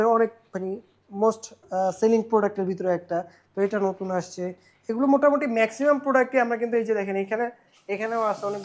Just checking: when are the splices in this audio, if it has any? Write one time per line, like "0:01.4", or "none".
none

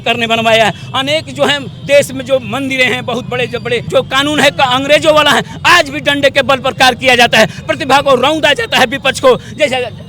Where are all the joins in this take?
0:03.8

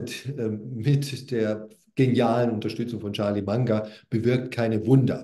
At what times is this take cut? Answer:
none

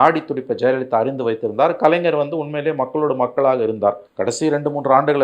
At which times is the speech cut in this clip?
0:04.1

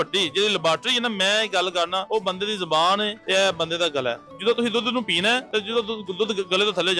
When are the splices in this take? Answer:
0:02.0
0:03.2
0:04.3
0:05.5

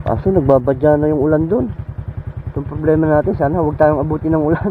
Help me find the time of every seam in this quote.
none

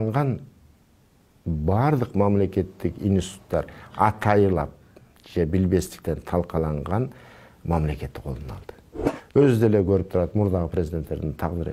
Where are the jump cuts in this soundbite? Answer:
0:09.0

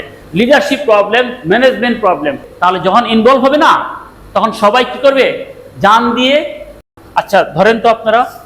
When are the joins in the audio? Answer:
0:02.5
0:06.8

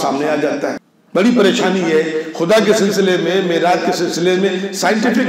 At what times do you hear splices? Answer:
0:00.9

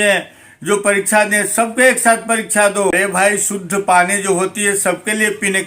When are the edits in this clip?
0:02.9

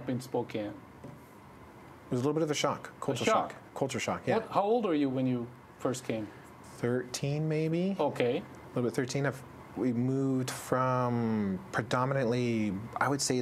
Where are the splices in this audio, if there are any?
none

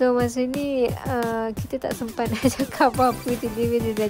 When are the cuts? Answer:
none

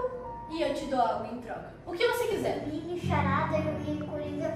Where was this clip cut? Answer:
0:02.6

